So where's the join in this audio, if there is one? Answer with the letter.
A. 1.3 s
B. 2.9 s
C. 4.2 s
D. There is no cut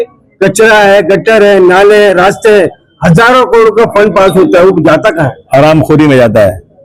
D